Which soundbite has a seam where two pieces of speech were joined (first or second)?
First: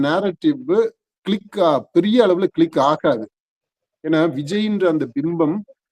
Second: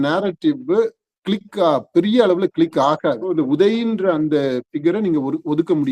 second